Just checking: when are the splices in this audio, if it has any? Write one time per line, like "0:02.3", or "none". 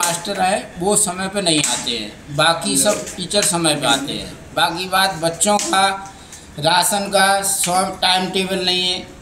none